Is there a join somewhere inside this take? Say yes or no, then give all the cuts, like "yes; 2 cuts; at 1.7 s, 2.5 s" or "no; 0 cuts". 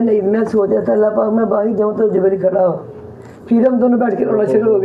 no; 0 cuts